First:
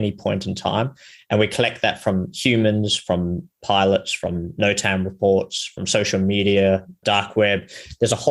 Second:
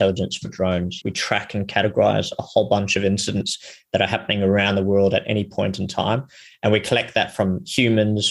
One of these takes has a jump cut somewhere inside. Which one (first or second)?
second